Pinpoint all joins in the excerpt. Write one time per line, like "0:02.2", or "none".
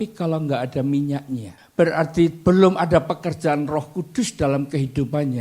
0:01.5